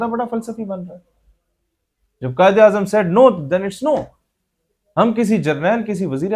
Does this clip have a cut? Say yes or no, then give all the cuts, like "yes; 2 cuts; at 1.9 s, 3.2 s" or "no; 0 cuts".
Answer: no; 0 cuts